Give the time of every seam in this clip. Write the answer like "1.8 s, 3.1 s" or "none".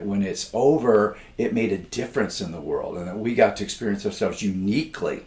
none